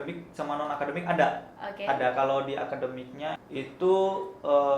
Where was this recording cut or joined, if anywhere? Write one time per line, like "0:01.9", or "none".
0:03.4

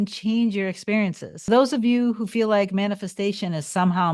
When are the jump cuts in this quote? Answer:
0:01.5

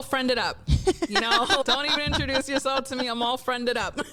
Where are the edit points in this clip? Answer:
none

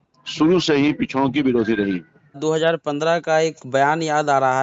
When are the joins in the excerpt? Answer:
0:02.4

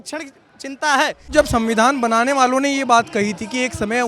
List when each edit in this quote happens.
0:01.3

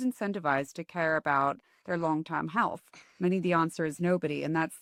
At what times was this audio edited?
none

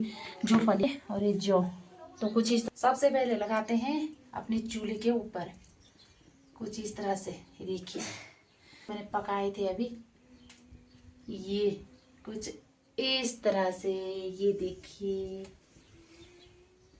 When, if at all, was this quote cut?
0:00.8
0:02.6
0:09.0

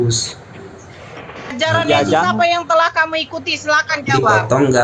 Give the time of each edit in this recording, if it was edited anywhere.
0:01.5

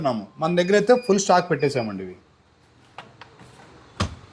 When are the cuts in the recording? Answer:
none

